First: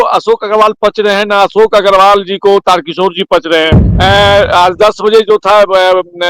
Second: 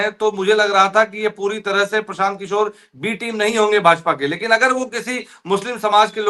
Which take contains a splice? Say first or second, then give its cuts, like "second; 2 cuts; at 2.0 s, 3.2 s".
first; 1 cut; at 3.8 s